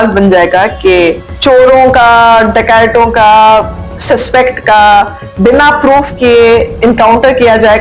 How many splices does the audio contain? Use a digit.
1